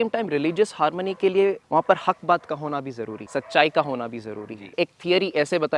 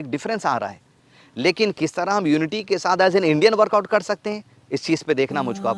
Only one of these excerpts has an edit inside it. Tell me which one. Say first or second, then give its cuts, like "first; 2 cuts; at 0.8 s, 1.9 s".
first; 3 cuts; at 1.6 s, 3.1 s, 4.8 s